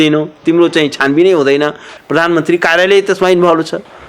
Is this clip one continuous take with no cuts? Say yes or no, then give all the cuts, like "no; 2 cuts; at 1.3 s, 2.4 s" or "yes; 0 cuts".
no; 1 cut; at 1.9 s